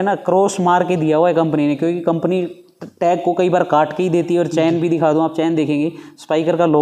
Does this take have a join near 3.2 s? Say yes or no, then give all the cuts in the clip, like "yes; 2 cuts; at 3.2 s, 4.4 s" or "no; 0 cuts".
no; 0 cuts